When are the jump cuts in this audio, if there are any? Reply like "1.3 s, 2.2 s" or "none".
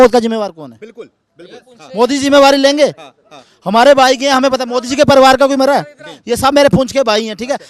none